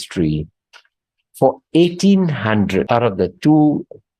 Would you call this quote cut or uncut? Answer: cut